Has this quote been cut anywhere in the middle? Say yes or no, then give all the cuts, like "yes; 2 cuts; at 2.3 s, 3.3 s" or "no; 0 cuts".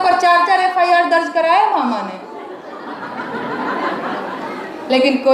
no; 0 cuts